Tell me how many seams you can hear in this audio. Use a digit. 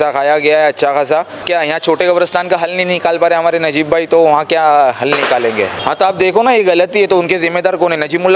2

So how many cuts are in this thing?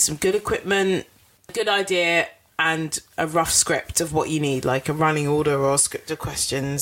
0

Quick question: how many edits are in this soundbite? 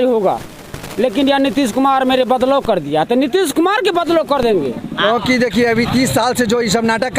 1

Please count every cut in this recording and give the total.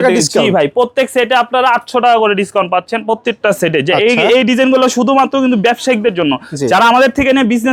0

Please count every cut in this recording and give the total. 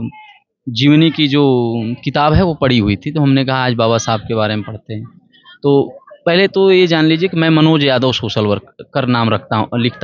0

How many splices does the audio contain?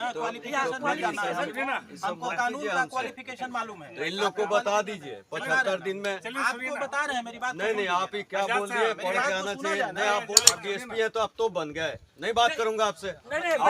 1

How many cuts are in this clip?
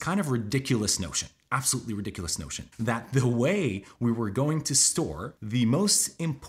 1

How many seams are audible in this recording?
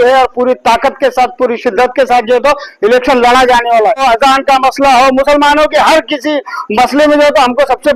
1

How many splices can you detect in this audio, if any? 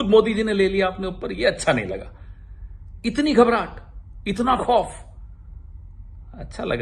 0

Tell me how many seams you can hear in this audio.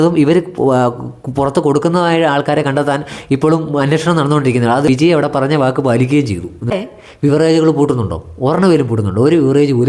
2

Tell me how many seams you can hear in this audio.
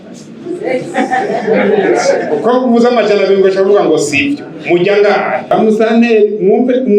1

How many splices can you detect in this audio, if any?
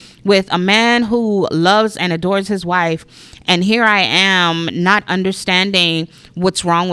0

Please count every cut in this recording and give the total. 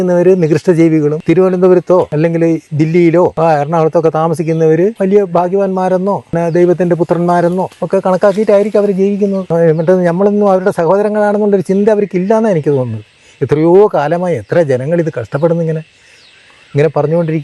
7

